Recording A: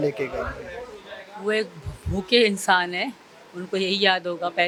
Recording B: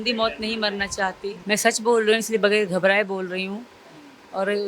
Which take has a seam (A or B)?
B